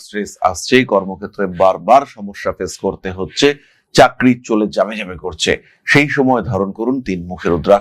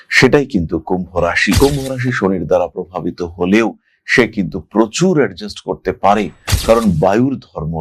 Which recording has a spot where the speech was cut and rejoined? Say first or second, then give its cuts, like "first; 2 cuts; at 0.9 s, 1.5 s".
second; 1 cut; at 1.6 s